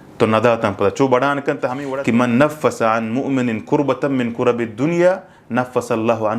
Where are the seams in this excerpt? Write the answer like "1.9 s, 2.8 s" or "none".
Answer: 1.9 s